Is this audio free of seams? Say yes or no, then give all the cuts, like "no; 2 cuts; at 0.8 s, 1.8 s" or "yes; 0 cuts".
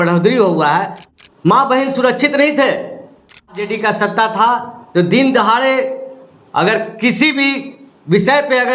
no; 2 cuts; at 1.0 s, 3.6 s